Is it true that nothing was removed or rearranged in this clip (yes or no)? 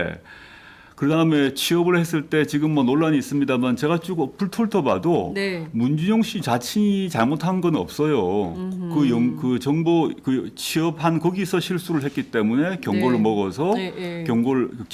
no